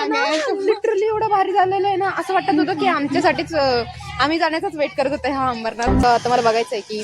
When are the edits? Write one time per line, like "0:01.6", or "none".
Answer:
0:06.0